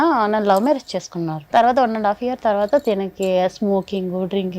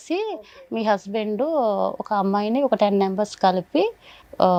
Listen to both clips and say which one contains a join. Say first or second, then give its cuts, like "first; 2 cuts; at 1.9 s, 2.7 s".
first; 1 cut; at 1.4 s